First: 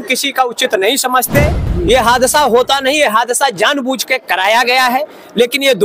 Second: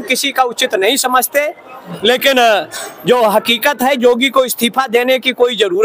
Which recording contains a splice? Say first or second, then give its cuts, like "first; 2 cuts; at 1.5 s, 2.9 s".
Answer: first; 1 cut; at 1.6 s